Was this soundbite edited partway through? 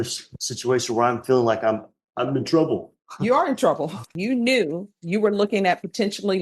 yes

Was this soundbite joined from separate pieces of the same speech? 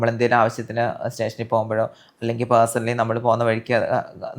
no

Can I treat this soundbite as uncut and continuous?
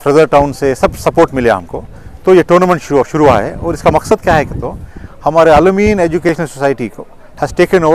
yes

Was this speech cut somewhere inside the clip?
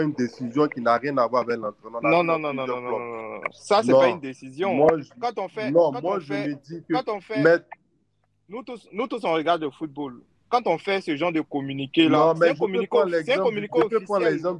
no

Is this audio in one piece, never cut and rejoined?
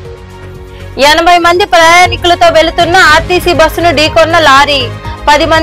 no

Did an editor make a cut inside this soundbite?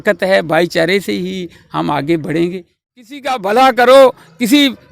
yes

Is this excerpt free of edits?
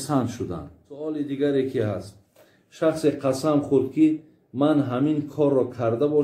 no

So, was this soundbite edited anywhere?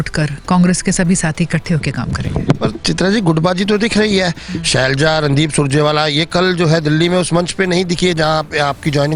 no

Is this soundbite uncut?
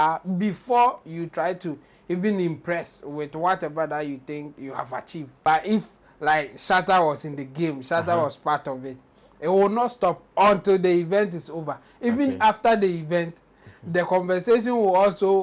no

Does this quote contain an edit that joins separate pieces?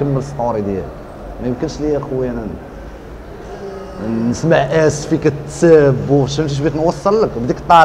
no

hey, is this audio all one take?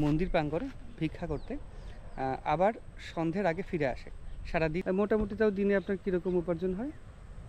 no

